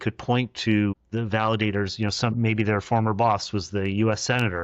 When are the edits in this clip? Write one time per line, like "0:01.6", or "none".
0:01.0